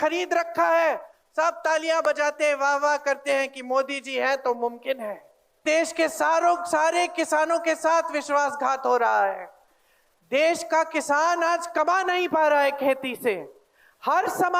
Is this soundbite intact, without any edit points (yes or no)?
no